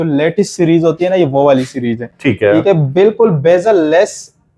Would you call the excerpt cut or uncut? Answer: uncut